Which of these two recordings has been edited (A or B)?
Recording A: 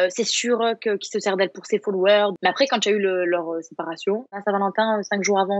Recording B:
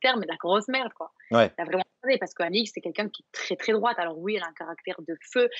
A